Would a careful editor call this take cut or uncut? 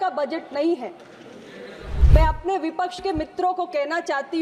cut